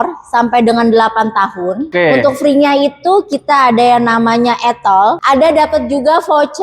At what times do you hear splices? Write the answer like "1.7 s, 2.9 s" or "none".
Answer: 1.8 s, 5.2 s